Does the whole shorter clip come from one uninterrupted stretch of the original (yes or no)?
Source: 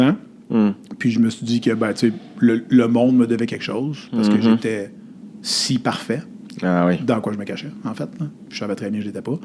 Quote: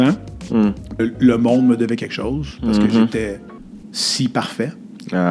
no